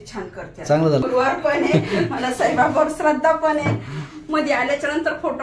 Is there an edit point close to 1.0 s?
yes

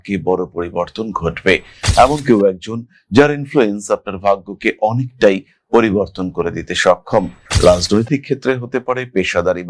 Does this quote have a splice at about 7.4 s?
yes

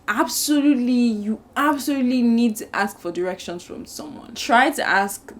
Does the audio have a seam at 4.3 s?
yes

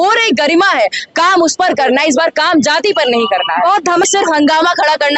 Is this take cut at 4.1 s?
yes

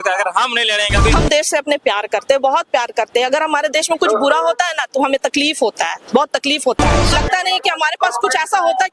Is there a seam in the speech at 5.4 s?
no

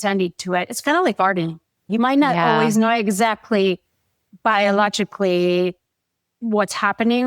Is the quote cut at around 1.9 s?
yes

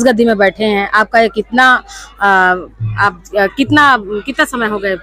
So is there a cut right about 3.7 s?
no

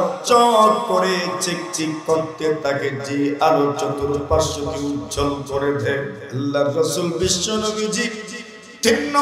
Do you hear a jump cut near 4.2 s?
no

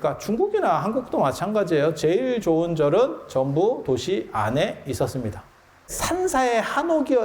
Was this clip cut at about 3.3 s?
no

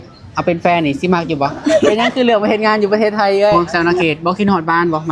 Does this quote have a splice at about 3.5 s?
yes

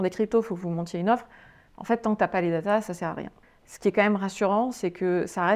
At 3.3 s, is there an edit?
yes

